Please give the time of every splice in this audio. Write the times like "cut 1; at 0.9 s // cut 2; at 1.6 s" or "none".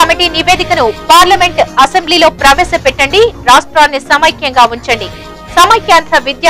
none